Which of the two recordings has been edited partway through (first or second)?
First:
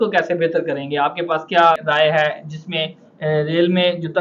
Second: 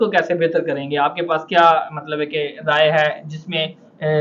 first